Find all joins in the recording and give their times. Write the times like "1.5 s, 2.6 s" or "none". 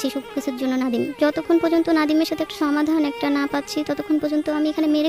1.2 s, 2.5 s